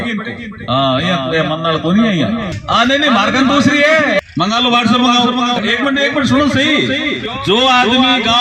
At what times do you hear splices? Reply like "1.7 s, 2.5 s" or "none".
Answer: 2.5 s, 4.2 s, 5.6 s, 7.3 s